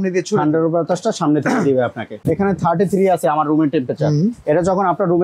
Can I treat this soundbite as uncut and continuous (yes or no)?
no